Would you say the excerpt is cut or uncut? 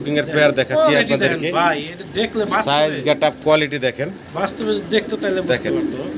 uncut